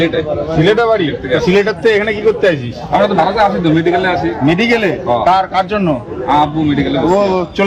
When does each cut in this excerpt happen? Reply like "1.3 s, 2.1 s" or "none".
none